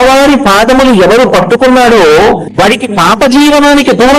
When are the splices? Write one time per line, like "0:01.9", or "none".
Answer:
0:02.5